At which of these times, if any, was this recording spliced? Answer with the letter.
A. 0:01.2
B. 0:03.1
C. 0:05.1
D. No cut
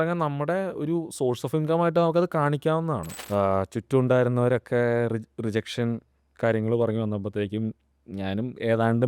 B